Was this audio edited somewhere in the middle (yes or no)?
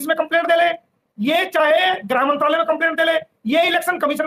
no